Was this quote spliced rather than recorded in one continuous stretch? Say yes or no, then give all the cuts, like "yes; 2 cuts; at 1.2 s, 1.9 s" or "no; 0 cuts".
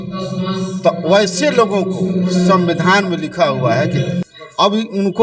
yes; 1 cut; at 4.2 s